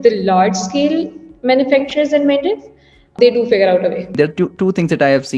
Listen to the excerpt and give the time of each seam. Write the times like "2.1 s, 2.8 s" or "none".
3.1 s, 4.1 s

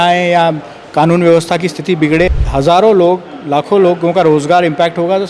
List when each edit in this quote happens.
2.4 s

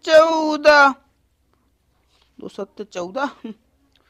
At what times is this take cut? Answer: none

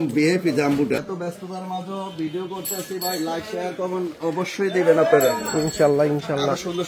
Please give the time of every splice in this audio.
1.1 s

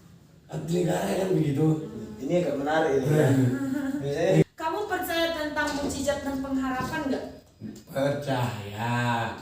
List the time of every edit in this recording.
4.4 s

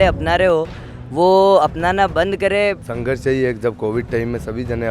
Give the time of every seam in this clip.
2.9 s

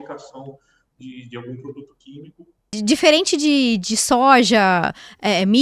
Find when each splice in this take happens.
2.8 s

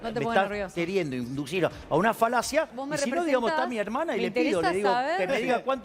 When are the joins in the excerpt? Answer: 2.8 s

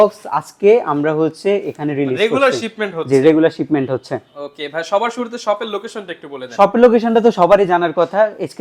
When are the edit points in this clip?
none

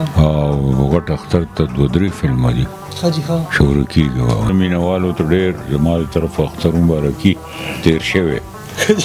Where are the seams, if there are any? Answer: 4.5 s

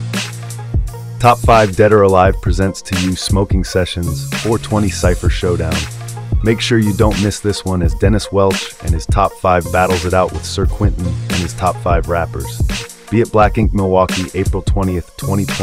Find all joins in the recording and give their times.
1.1 s

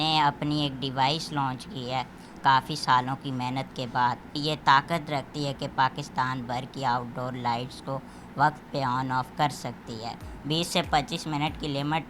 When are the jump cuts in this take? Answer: 4.4 s, 10.3 s

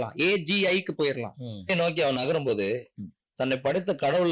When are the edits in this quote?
1.7 s

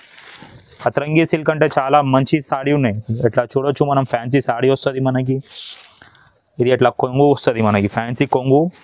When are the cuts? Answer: none

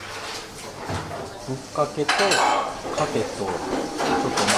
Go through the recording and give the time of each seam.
1.4 s

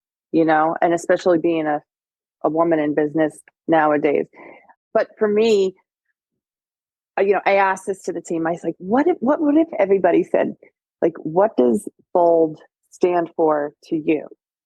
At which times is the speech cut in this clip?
1.4 s, 4.8 s

